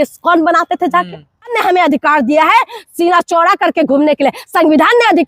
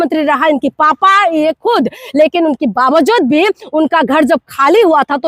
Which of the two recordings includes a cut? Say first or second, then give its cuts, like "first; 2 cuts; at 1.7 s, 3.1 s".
first; 1 cut; at 1.6 s